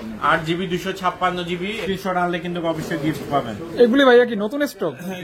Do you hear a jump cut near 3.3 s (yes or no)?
no